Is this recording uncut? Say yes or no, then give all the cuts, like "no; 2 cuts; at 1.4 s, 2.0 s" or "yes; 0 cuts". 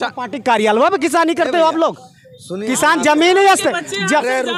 yes; 0 cuts